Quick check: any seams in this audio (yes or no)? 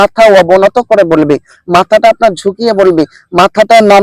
no